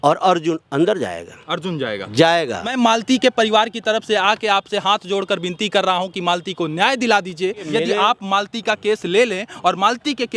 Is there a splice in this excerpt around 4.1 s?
no; 2 cuts; at 2.7 s, 7.7 s

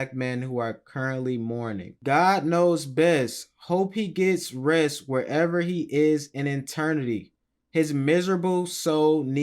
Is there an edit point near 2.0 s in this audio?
yes; 1 cut; at 2.0 s

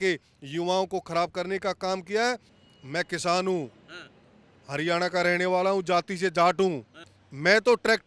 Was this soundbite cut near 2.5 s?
yes; 1 cut; at 2.5 s

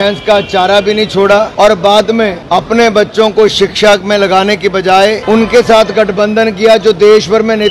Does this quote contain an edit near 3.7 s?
no; 3 cuts; at 1.5 s, 2.4 s, 5.2 s

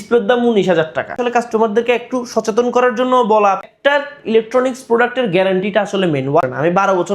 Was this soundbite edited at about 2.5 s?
no; 3 cuts; at 1.2 s, 3.7 s, 6.4 s

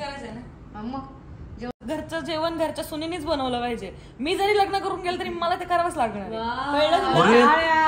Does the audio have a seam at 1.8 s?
yes; 1 cut; at 1.8 s

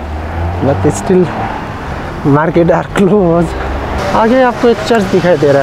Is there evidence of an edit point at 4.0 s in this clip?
yes; 1 cut; at 4.0 s

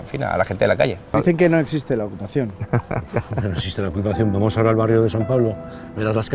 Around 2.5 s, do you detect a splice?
no; 1 cut; at 1.1 s

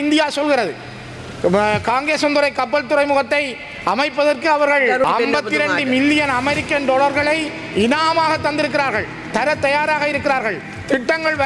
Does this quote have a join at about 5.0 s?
yes; 1 cut; at 5.0 s

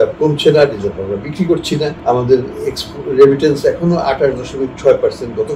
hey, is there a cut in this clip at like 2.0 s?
yes; 1 cut; at 2.0 s

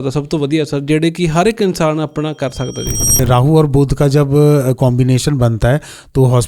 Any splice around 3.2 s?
yes; 1 cut; at 3.2 s

